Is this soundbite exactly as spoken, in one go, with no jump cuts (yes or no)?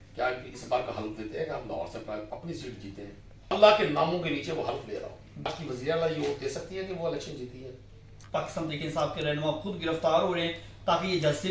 no